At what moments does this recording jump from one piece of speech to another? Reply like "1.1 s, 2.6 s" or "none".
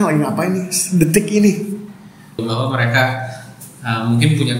2.3 s